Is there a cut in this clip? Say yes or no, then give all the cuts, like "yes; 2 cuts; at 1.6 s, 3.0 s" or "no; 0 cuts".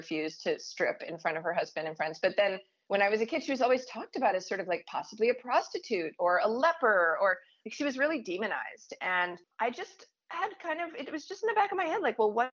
yes; 1 cut; at 9.4 s